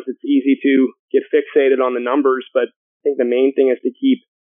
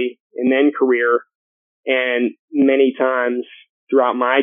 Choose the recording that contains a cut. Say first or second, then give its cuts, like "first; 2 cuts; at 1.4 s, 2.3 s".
first; 2 cuts; at 1.0 s, 2.8 s